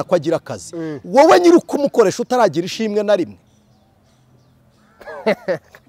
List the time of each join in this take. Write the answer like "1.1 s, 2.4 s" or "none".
none